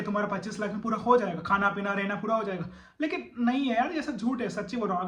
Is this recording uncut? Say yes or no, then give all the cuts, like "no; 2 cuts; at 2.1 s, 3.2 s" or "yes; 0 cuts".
yes; 0 cuts